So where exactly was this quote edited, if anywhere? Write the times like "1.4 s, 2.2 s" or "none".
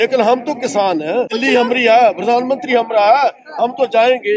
1.3 s